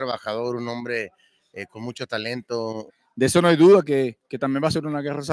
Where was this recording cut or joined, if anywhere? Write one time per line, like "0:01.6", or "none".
0:03.0